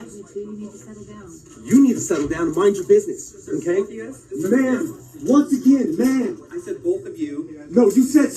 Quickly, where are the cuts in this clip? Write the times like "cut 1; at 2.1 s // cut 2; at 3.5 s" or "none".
cut 1; at 1.8 s